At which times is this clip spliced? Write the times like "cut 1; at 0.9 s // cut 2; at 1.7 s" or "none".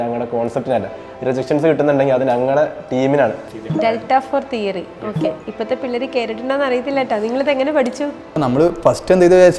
cut 1; at 3.5 s // cut 2; at 8.4 s